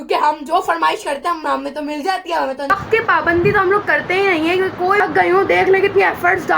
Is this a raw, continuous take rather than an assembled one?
no; 2 cuts; at 2.9 s, 5.0 s

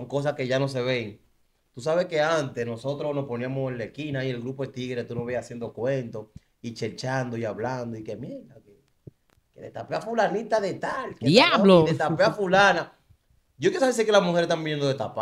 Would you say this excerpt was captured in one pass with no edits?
yes; 0 cuts

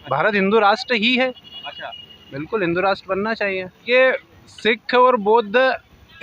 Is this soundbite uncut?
no; 1 cut; at 3.8 s

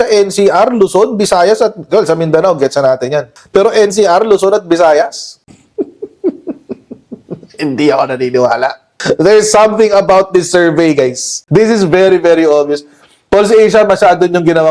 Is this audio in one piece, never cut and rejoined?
no; 2 cuts; at 8.9 s, 11.3 s

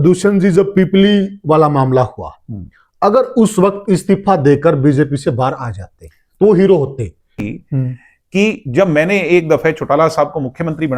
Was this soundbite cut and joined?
yes; 1 cut; at 7.3 s

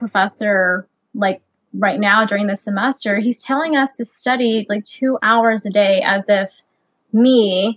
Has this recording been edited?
no; 0 cuts

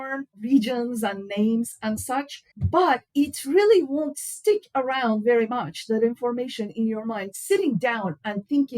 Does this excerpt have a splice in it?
yes; 1 cut; at 7.3 s

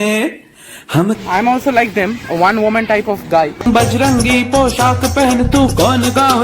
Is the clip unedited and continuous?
no; 2 cuts; at 1.2 s, 3.7 s

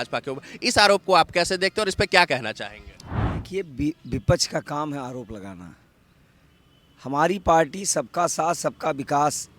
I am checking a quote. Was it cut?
no; 0 cuts

